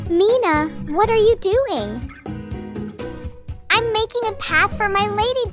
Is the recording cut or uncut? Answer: uncut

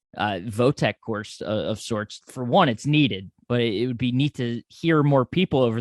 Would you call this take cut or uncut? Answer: cut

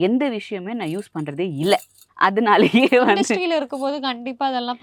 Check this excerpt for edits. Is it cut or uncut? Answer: uncut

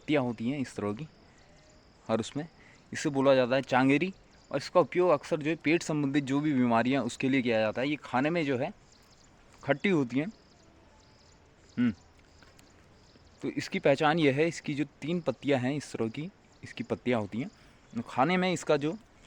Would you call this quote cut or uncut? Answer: uncut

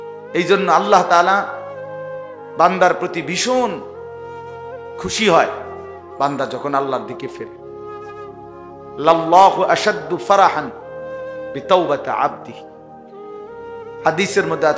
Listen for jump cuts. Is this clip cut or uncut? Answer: cut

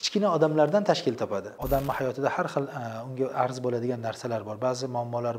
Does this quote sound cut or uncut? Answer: cut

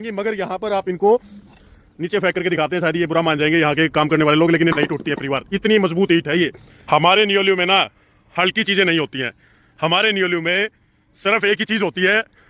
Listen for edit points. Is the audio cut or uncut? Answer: cut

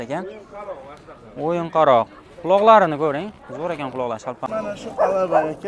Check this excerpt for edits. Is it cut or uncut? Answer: cut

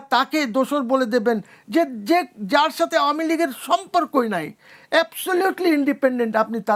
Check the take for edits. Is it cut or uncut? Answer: uncut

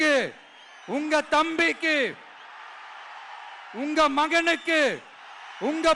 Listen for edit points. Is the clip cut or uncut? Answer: uncut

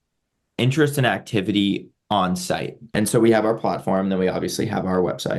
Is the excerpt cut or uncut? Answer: cut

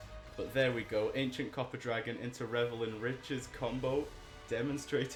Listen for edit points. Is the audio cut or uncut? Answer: uncut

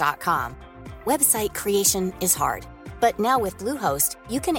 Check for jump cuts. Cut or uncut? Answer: uncut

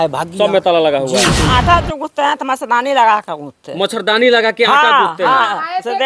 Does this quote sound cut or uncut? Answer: cut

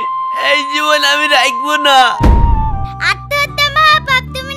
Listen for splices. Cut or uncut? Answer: uncut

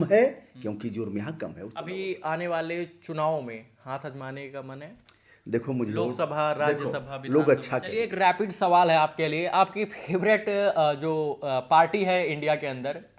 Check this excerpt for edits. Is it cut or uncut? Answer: cut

